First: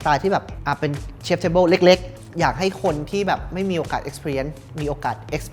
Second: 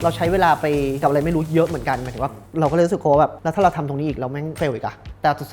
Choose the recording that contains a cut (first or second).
second